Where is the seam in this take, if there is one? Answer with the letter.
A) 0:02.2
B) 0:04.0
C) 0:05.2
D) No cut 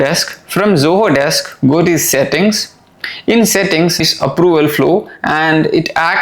B